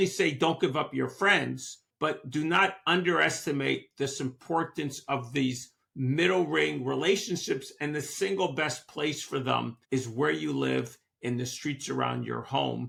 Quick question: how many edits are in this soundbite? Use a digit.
0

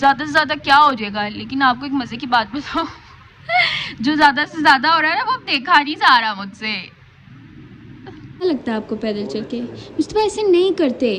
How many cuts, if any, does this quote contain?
1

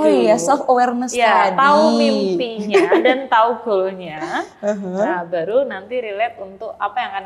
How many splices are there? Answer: 0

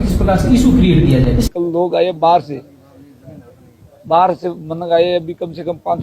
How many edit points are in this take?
1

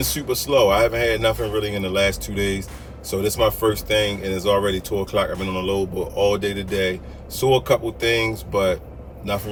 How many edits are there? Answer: 0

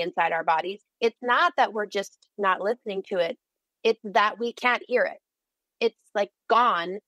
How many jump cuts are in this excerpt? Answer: 0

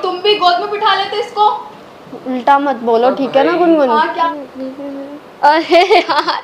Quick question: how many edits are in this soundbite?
1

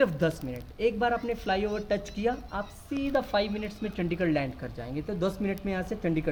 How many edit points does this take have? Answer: 0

